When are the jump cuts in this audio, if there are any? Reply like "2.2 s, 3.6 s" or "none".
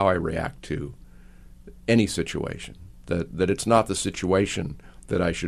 none